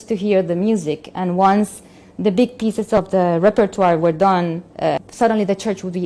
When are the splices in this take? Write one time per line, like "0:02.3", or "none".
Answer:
0:03.0
0:05.1